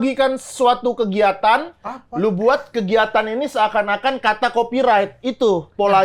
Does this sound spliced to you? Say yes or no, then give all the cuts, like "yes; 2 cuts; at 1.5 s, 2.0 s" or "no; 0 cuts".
no; 0 cuts